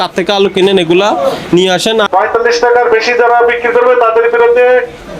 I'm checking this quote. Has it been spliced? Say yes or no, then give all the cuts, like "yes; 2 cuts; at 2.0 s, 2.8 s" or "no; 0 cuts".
yes; 1 cut; at 2.1 s